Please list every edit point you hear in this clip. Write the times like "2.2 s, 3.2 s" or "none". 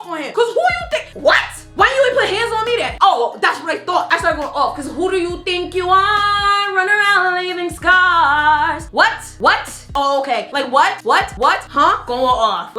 1.7 s, 2.9 s, 4.1 s, 9.8 s